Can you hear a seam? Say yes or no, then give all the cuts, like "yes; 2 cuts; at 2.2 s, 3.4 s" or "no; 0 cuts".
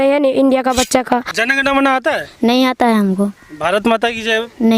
yes; 1 cut; at 1.3 s